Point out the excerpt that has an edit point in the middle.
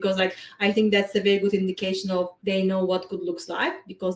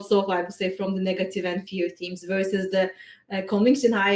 first; 1 cut; at 2.4 s

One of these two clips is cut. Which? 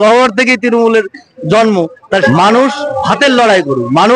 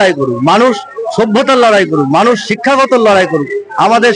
first; 1 cut; at 2.2 s

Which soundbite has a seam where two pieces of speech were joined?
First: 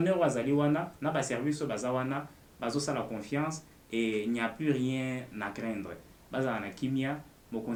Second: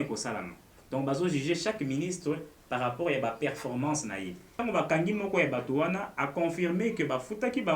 second; 1 cut; at 4.6 s

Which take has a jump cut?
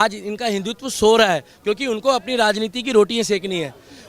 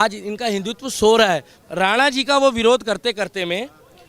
second; 1 cut; at 1.5 s

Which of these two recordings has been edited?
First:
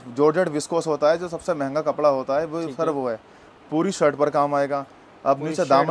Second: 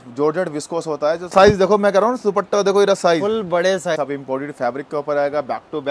second; 2 cuts; at 1.3 s, 3.9 s

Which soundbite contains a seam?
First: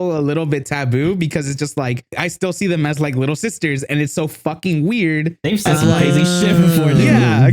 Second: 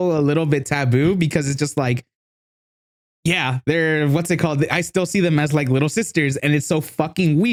first; 1 cut; at 2.2 s

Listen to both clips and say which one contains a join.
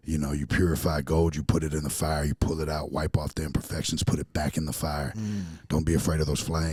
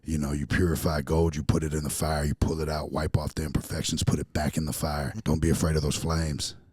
second; 1 cut; at 5.1 s

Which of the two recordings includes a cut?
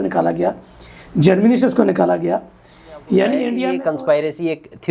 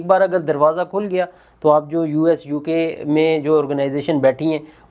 first; 1 cut; at 3.7 s

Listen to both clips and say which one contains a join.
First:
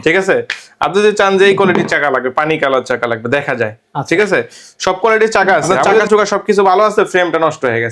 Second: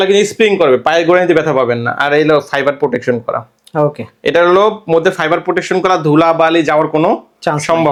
first; 1 cut; at 6.0 s

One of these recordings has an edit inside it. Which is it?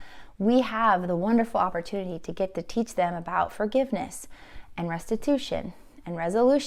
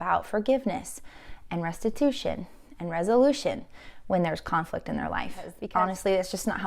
second; 1 cut; at 5.5 s

